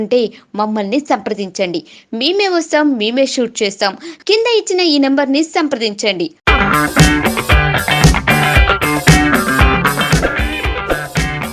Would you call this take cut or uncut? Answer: uncut